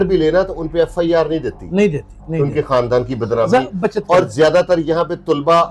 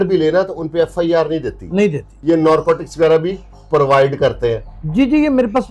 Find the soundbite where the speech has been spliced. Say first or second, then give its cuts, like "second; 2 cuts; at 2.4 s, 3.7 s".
second; 1 cut; at 2.1 s